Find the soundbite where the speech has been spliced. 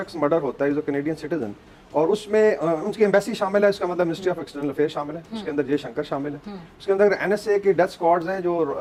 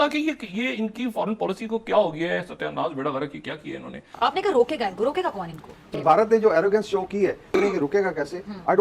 second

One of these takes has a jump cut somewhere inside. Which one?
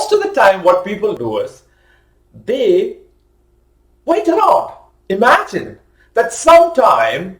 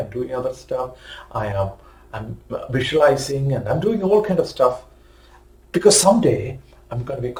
first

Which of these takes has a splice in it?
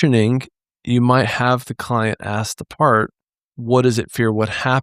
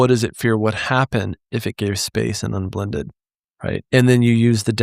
second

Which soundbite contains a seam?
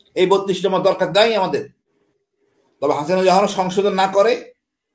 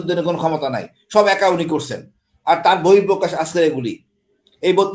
first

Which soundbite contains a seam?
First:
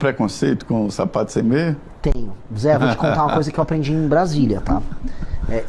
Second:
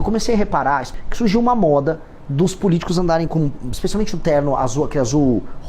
second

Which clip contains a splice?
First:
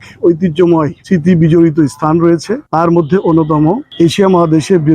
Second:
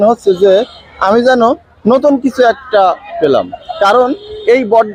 first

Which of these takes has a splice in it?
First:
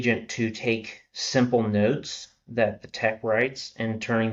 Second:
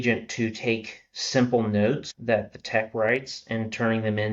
second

